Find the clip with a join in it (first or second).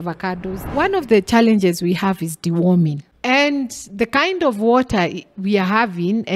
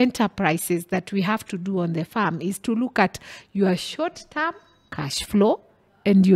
first